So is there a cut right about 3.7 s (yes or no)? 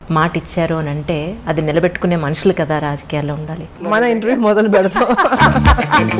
yes